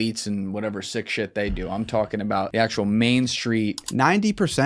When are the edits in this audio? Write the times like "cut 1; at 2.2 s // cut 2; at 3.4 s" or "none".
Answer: cut 1; at 2.5 s // cut 2; at 3.8 s